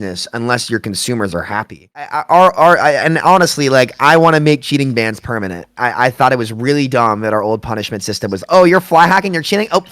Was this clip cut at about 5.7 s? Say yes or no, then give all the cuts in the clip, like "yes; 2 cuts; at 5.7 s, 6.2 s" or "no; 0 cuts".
no; 1 cut; at 2.0 s